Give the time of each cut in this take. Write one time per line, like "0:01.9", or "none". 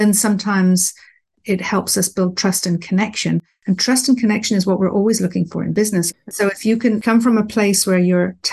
0:05.8